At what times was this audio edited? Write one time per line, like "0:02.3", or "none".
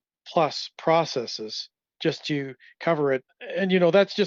0:01.9
0:03.3